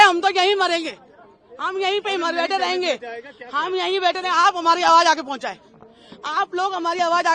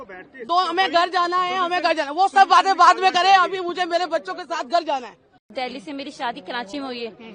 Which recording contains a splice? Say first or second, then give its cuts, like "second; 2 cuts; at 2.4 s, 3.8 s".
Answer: second; 1 cut; at 5.5 s